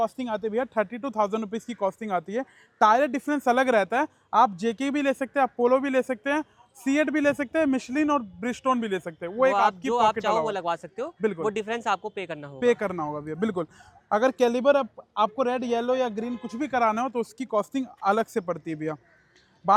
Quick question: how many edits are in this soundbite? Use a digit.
0